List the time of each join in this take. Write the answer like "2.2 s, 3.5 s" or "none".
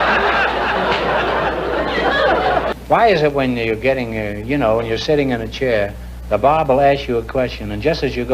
2.7 s